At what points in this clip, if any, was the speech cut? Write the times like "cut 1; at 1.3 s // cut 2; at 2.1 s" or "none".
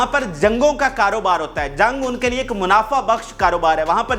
none